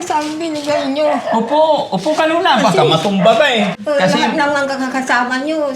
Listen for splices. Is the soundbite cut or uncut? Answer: cut